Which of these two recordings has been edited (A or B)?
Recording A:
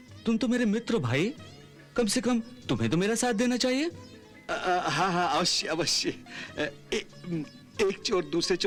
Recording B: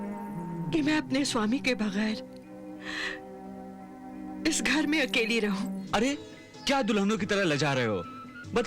B